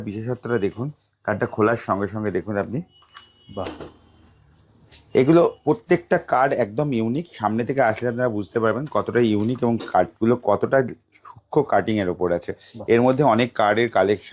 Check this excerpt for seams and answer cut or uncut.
uncut